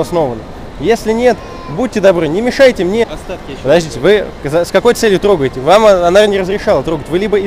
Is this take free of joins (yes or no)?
no